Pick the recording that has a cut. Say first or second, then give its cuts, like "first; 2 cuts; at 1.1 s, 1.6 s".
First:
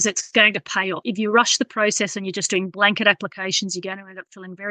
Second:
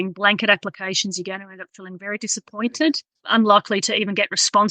second; 1 cut; at 3.1 s